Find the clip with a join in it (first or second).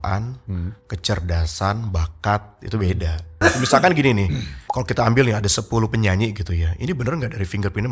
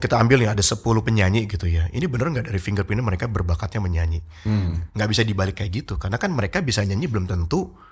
first